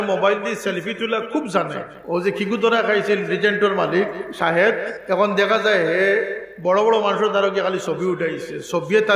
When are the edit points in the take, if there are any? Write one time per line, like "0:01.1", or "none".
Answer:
0:01.9